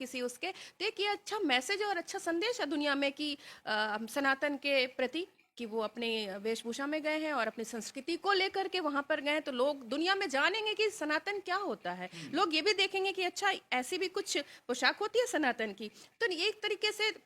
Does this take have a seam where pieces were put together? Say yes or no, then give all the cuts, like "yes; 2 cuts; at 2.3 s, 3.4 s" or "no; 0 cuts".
no; 0 cuts